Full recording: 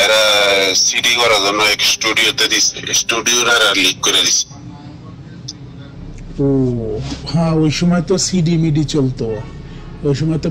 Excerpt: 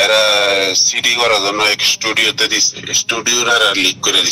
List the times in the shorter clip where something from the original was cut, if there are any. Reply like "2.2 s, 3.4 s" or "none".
none